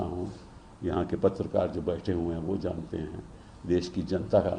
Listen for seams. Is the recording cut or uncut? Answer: uncut